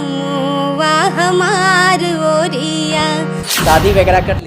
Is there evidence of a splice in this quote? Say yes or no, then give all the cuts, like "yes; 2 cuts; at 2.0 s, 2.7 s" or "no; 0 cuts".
yes; 1 cut; at 3.5 s